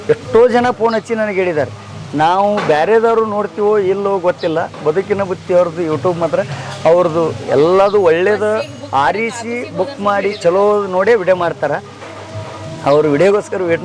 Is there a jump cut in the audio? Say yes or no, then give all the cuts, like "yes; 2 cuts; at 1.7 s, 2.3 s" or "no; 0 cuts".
no; 0 cuts